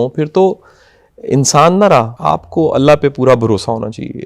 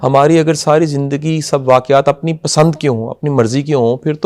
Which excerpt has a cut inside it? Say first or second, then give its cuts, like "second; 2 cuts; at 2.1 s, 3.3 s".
first; 1 cut; at 2.1 s